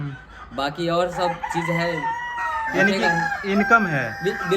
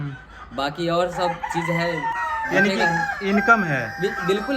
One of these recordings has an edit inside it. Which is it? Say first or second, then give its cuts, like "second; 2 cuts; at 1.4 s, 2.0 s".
second; 1 cut; at 2.2 s